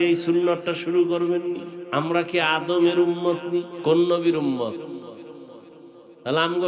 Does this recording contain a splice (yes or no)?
yes